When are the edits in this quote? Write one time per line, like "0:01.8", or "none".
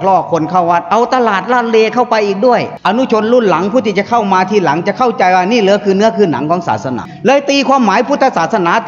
0:02.7
0:07.1